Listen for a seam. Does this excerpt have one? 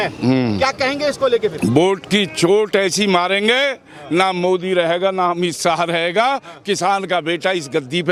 no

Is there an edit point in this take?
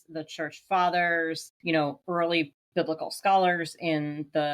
yes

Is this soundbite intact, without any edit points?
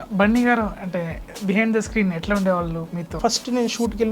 no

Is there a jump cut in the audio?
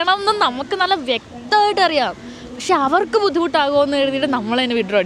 no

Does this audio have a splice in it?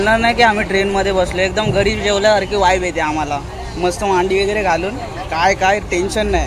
no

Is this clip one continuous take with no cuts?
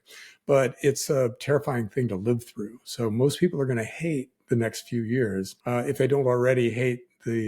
no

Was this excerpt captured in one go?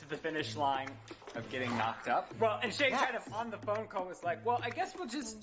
no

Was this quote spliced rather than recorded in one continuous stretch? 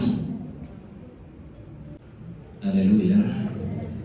yes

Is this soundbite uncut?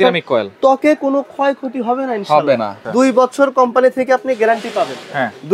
no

